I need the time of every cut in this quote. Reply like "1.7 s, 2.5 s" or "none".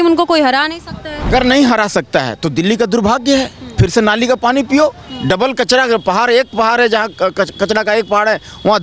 1.3 s